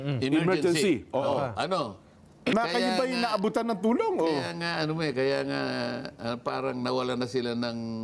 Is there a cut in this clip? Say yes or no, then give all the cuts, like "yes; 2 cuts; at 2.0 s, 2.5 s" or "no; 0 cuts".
yes; 1 cut; at 2.5 s